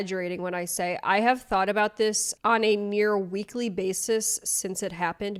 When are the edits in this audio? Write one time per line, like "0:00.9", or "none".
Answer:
none